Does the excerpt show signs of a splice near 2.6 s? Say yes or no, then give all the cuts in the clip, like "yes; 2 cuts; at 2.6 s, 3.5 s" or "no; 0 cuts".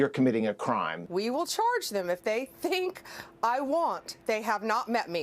no; 1 cut; at 1.0 s